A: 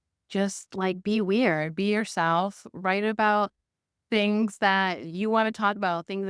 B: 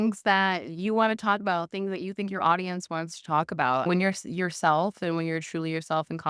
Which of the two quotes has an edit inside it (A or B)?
B